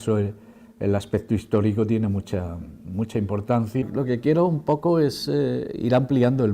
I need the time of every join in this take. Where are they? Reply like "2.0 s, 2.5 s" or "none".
3.8 s